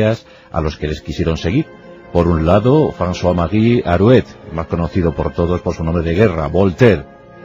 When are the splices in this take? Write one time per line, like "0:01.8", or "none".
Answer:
0:02.6